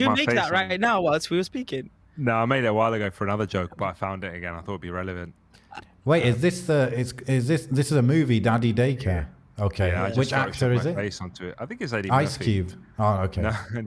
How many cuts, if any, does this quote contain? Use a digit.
0